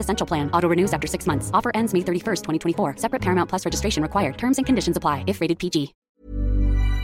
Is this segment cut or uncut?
cut